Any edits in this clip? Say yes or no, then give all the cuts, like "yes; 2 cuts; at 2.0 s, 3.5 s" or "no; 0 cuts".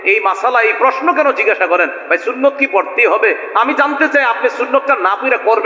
no; 0 cuts